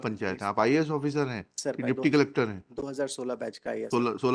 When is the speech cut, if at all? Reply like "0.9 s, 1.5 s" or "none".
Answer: none